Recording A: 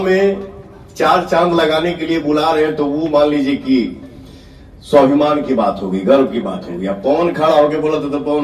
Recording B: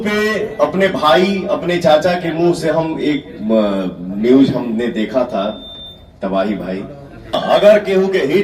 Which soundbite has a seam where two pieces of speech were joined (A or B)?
B